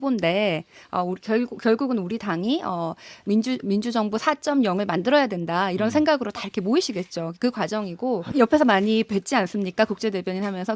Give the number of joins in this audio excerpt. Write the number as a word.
one